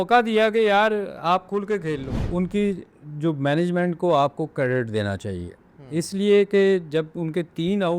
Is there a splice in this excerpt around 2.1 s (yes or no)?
yes